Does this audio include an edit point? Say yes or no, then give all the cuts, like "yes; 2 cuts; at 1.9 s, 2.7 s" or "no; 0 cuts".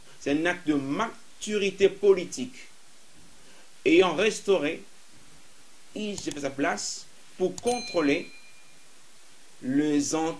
no; 0 cuts